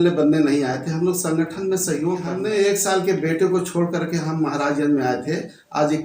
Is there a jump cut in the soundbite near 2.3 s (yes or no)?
yes